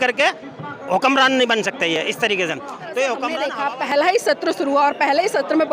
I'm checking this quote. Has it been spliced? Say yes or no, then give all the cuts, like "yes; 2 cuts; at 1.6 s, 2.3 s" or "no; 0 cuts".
yes; 1 cut; at 3.3 s